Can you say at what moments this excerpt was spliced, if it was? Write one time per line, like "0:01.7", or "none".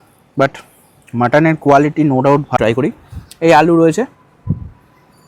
0:02.6

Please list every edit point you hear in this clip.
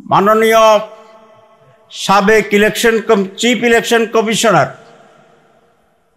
none

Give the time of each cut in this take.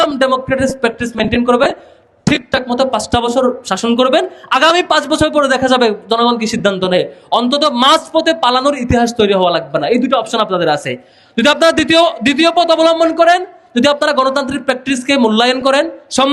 none

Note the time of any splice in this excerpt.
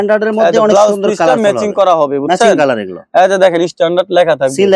none

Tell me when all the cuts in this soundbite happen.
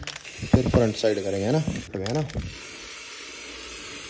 0:01.9

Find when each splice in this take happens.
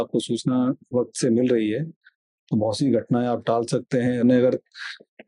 0:04.2

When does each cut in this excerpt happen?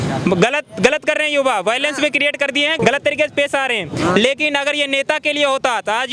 0:02.8

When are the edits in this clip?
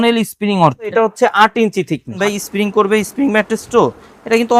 0:00.9
0:02.2

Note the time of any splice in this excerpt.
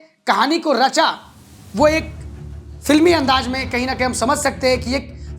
none

